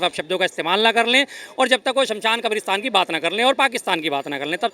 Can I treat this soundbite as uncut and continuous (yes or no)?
yes